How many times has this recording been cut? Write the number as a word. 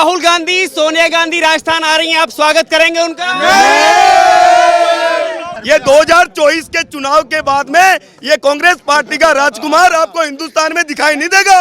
one